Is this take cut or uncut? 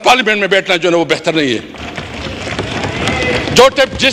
uncut